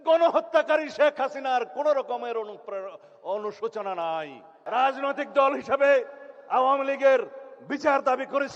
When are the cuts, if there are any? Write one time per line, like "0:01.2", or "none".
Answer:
0:04.6